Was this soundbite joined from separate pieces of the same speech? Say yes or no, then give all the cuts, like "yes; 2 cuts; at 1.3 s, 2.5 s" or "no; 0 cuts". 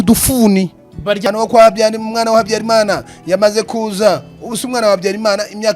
yes; 1 cut; at 1.2 s